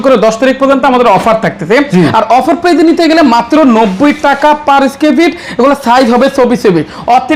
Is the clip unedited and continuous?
yes; 0 cuts

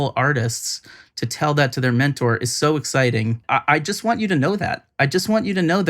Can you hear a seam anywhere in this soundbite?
yes; 1 cut; at 3.4 s

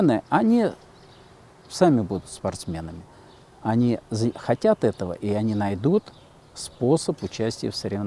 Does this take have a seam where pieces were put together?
no; 0 cuts

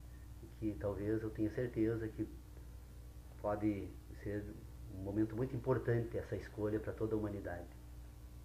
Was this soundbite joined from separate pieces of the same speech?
yes; 1 cut; at 2.6 s

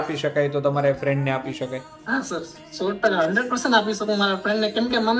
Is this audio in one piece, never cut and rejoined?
no; 1 cut; at 1.9 s

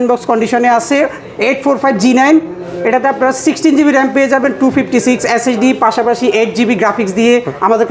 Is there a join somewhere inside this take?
no; 0 cuts

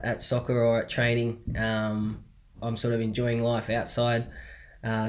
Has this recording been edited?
no; 0 cuts

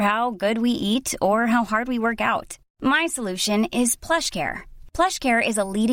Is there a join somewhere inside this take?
no; 0 cuts

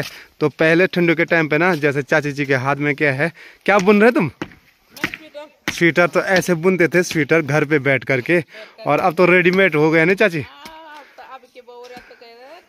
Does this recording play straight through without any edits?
yes; 0 cuts

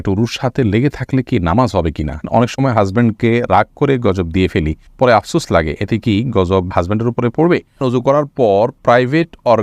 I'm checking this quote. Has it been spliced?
yes; 2 cuts; at 2.3 s, 7.8 s

